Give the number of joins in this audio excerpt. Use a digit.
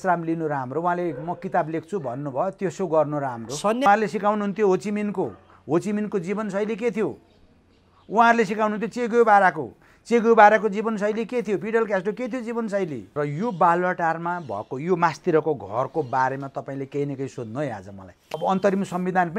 3